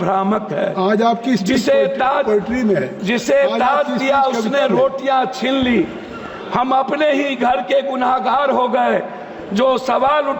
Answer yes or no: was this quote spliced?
no